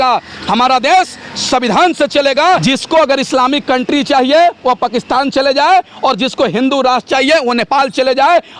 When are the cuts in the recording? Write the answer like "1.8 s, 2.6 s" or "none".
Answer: 2.6 s